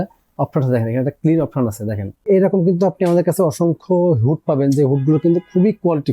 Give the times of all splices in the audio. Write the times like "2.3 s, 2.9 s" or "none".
2.2 s